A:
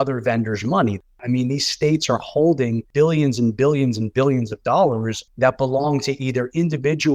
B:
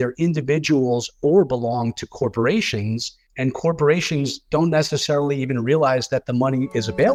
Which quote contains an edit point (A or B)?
A